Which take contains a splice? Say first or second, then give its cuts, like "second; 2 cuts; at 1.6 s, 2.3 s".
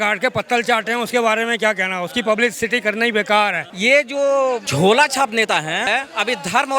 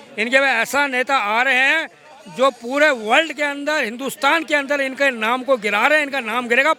first; 3 cuts; at 3.7 s, 4.7 s, 5.9 s